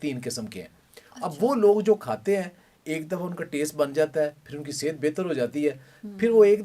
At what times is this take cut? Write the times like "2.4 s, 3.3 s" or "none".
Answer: none

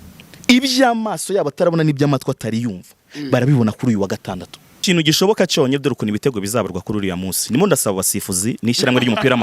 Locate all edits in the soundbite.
4.8 s

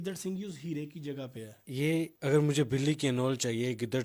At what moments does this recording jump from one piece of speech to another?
1.7 s

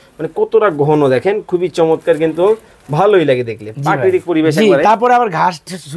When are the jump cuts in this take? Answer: none

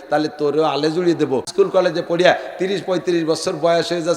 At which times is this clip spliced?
1.5 s

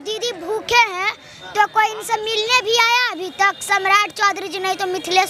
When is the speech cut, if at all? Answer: none

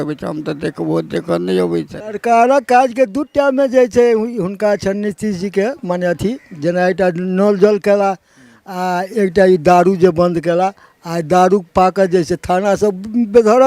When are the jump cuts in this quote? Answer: 2.0 s

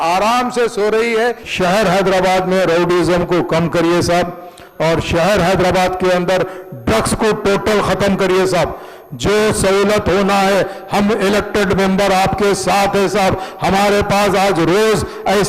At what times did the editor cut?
1.4 s

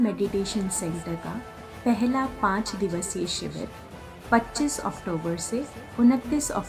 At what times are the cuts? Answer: none

